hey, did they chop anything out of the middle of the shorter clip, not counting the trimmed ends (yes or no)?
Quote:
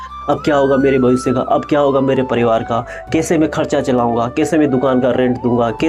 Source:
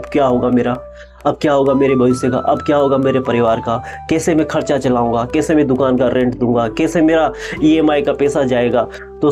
no